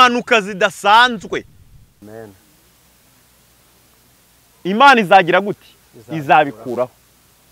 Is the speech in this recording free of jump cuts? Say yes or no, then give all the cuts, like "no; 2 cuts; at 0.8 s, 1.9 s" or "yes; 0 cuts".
no; 1 cut; at 2.0 s